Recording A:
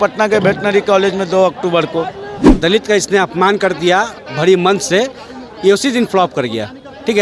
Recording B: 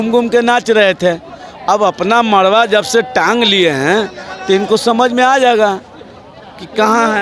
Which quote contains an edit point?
A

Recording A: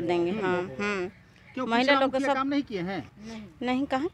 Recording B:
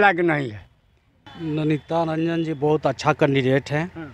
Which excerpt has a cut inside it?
B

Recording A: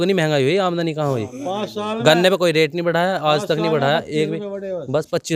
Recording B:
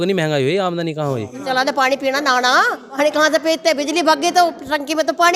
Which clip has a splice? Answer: B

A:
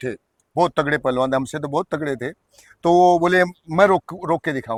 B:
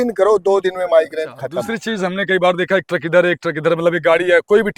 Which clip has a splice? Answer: B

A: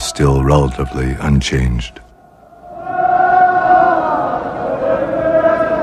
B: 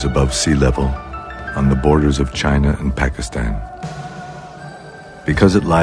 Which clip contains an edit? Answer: A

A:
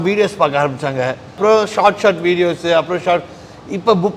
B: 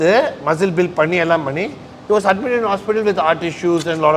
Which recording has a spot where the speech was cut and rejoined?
A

